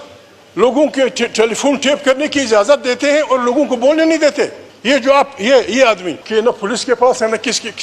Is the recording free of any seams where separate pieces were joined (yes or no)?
no